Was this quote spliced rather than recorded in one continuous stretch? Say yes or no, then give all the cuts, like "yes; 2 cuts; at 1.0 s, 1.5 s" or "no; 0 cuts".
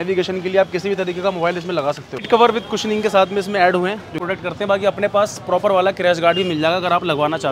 yes; 2 cuts; at 2.3 s, 4.1 s